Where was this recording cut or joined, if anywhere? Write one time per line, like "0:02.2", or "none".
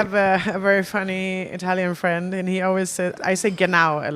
0:03.2

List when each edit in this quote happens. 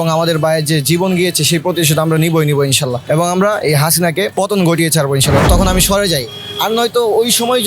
0:03.0
0:04.3
0:05.4

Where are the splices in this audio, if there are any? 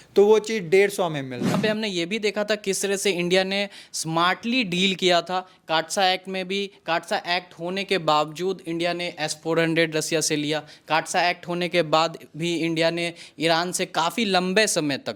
0:01.6

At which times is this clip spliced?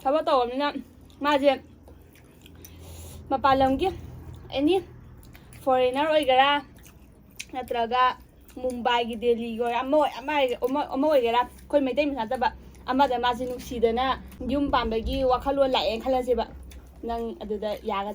0:14.3

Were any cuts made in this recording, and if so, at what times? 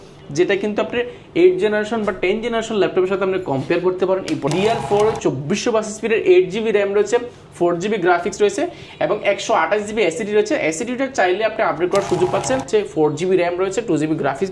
0:04.5
0:12.7

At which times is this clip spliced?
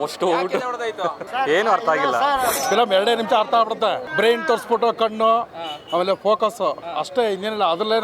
0:01.3
0:02.5
0:04.0

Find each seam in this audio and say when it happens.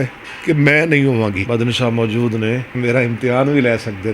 0:01.4
0:02.7

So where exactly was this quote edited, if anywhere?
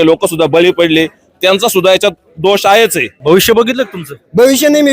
0:03.1

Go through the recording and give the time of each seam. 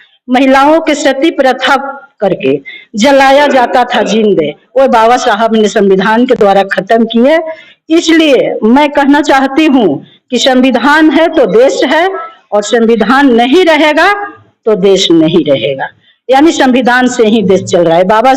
none

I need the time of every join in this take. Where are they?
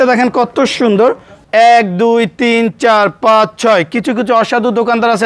0:01.3

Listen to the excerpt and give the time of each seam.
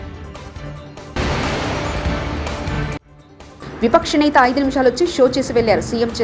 none

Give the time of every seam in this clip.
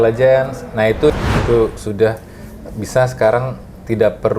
0:01.1

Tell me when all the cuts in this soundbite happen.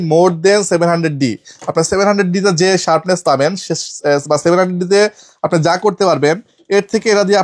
none

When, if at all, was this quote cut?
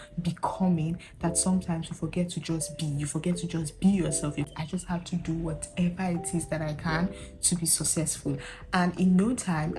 0:04.5

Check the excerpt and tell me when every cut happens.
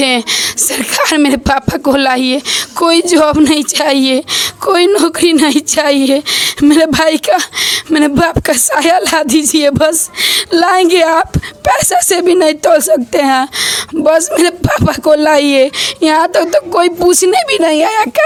none

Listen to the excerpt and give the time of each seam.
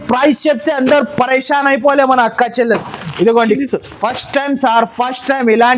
0:03.6

